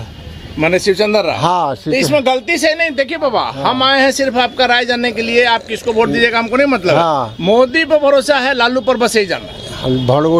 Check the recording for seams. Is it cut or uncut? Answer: uncut